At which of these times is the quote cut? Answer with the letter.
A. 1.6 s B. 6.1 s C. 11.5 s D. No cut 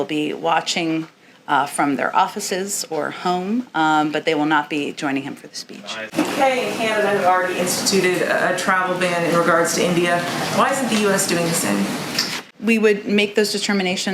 B